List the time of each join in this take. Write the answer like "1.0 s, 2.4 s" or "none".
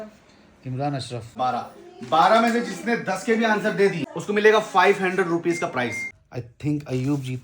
1.3 s, 4.1 s, 6.1 s